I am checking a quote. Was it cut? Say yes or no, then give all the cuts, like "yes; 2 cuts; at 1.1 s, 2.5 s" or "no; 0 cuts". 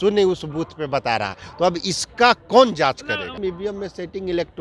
yes; 1 cut; at 3.4 s